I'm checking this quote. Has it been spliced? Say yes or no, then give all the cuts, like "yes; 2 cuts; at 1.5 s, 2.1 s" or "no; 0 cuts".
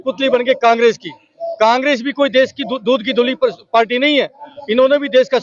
no; 0 cuts